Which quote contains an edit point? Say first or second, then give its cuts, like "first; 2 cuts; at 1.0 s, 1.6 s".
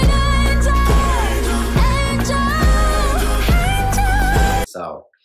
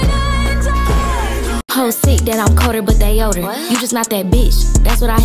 second; 1 cut; at 1.6 s